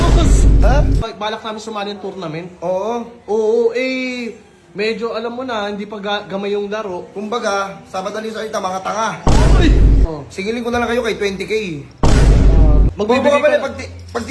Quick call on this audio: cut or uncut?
cut